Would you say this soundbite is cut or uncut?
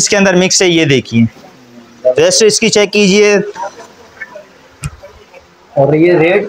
uncut